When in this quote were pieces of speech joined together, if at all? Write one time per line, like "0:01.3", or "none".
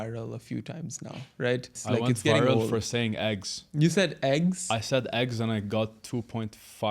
0:01.7